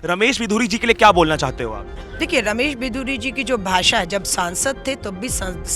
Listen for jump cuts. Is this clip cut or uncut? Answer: uncut